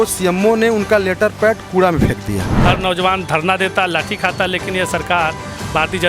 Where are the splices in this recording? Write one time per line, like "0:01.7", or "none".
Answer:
0:02.5